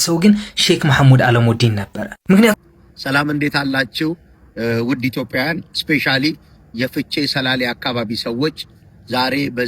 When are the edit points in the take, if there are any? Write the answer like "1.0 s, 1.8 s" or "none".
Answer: 2.5 s